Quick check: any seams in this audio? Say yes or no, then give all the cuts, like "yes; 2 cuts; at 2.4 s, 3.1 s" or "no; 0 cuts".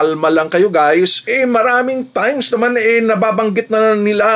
yes; 1 cut; at 1.2 s